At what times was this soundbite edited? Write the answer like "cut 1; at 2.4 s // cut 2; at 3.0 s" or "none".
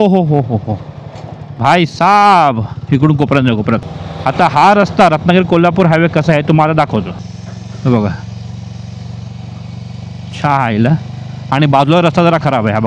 cut 1; at 3.8 s // cut 2; at 7.3 s